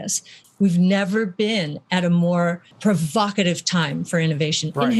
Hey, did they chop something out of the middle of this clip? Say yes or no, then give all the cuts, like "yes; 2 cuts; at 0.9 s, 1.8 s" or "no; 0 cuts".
no; 0 cuts